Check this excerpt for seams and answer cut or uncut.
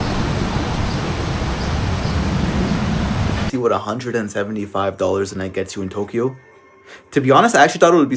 cut